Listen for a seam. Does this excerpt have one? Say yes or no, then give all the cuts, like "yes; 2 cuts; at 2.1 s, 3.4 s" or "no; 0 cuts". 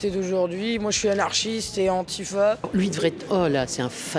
yes; 1 cut; at 2.6 s